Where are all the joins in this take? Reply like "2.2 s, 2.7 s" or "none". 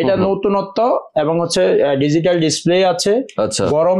none